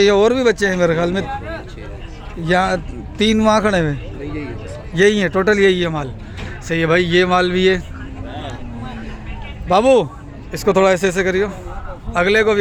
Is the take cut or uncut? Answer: uncut